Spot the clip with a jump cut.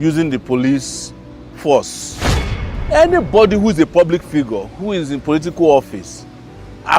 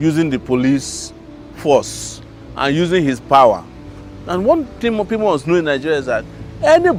first; 1 cut; at 2.6 s

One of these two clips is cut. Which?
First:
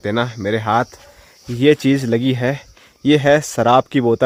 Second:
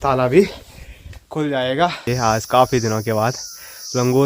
second; 1 cut; at 2.0 s

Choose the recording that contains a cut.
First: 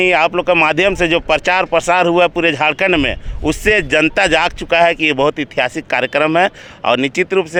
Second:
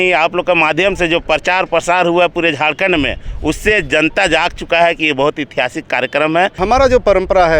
second; 1 cut; at 6.6 s

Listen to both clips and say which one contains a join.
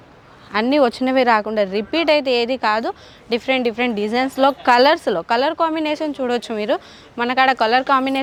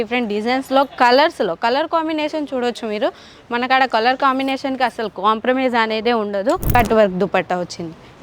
second; 1 cut; at 6.8 s

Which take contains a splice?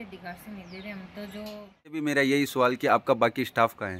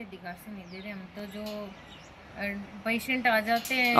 first; 1 cut; at 2.0 s

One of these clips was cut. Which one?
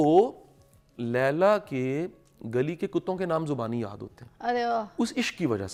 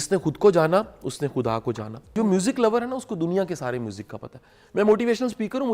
second; 1 cut; at 1.9 s

